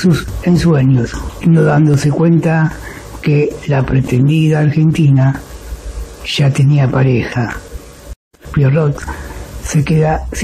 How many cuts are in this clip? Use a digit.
2